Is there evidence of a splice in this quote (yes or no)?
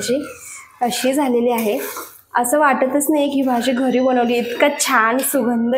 no